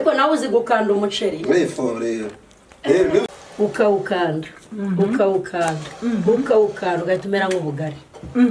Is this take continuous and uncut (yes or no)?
no